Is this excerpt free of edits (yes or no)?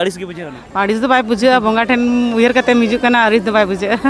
yes